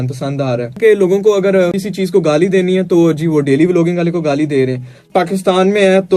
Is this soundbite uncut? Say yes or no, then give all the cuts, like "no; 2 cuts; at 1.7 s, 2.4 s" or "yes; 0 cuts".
no; 3 cuts; at 0.8 s, 1.8 s, 5.0 s